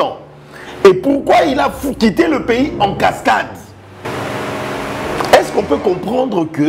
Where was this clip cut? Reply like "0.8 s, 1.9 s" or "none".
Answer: 4.1 s